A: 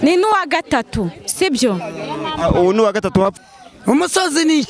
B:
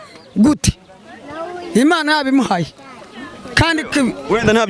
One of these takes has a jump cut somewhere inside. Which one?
A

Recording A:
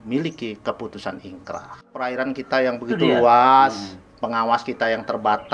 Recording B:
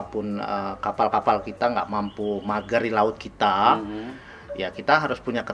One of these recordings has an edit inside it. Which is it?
A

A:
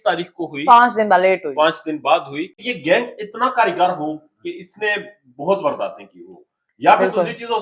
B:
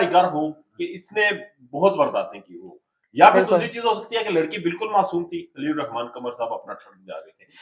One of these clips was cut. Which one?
A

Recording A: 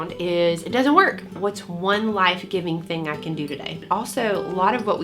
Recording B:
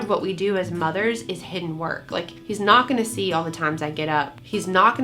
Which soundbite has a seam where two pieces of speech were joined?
A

